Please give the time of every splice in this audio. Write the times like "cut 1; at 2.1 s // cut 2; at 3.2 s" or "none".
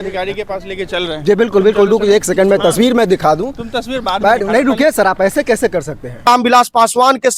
cut 1; at 6.3 s